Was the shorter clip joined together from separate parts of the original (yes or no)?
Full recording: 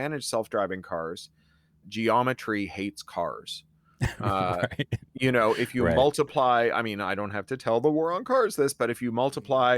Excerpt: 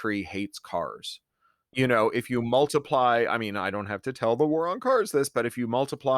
yes